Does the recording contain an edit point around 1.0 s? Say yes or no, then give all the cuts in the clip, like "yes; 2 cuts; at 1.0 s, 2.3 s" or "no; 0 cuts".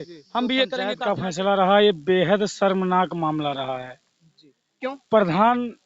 yes; 1 cut; at 1.0 s